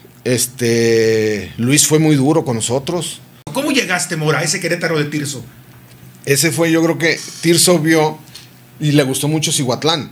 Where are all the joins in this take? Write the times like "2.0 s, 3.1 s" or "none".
3.4 s